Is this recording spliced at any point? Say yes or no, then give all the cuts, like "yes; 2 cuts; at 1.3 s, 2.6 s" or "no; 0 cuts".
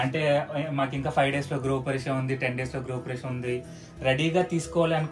no; 0 cuts